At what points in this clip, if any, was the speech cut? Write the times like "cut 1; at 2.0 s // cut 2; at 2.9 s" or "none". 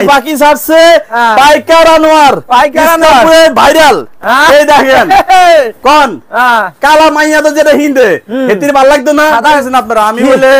cut 1; at 9.6 s